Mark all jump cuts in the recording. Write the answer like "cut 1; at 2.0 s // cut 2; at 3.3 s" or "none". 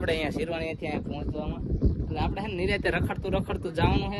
none